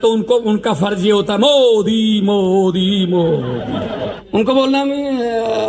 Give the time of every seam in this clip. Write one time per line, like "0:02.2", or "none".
0:04.2